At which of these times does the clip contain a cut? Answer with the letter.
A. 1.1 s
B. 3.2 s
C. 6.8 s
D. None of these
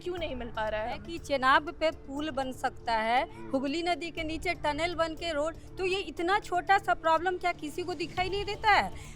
A